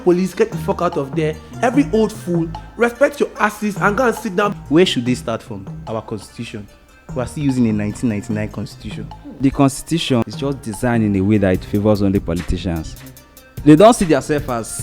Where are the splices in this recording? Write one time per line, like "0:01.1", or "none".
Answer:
0:04.5
0:09.3
0:10.2

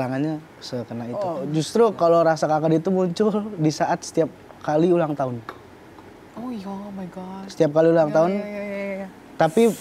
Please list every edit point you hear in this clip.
0:01.4

